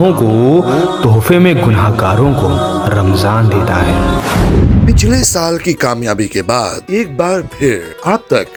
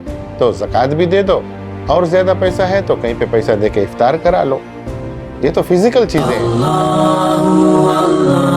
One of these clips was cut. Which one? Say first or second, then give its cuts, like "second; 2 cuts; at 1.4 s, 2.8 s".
second; 1 cut; at 6.3 s